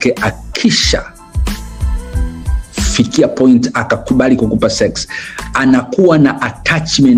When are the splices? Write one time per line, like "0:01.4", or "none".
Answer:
none

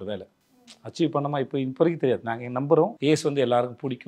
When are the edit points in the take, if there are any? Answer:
0:03.0

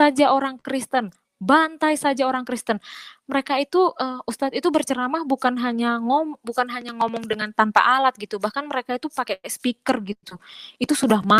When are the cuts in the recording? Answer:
none

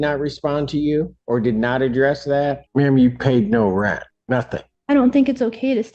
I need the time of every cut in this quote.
0:01.2
0:02.6
0:04.4

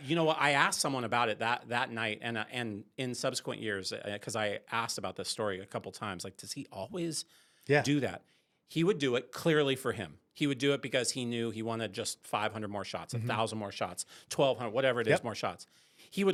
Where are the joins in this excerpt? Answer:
none

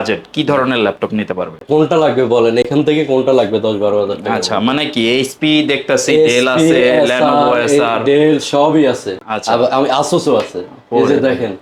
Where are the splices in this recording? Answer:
none

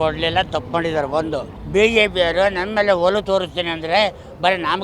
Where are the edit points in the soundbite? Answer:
0:01.5

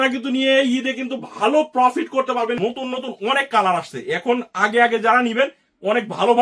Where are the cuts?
0:02.6

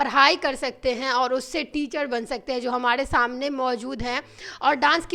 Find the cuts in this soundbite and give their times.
none

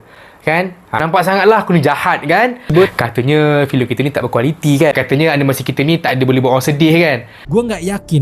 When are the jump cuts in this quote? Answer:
0:02.9

